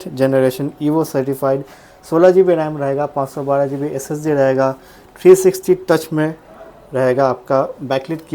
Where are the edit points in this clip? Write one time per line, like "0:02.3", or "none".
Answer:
none